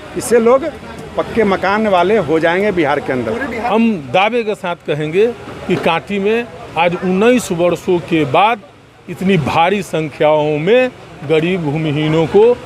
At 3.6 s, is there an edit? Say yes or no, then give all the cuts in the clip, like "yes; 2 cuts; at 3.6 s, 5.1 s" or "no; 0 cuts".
yes; 1 cut; at 3.6 s